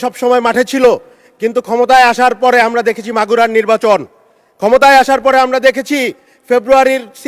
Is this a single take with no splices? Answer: yes; 0 cuts

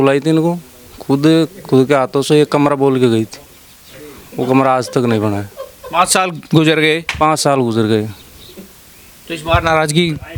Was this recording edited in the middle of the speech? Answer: no; 0 cuts

